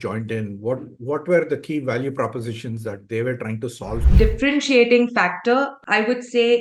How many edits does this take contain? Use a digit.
1